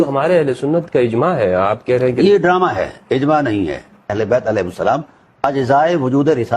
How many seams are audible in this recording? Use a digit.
1